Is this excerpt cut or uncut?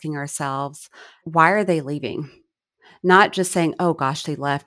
cut